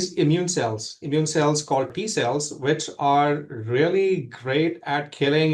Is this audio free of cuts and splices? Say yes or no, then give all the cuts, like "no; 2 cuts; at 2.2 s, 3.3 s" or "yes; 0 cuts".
no; 1 cut; at 1.9 s